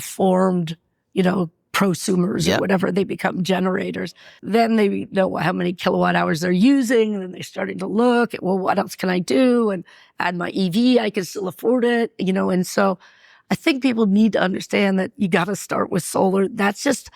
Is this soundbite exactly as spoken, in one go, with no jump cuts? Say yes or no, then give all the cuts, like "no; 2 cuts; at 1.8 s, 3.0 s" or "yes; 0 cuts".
no; 1 cut; at 4.1 s